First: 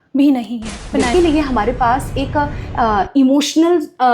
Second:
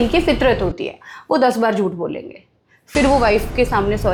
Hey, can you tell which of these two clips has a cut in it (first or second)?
first